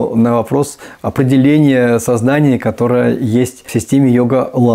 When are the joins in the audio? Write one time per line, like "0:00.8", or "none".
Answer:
0:03.7